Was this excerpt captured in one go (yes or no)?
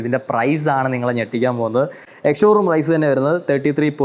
yes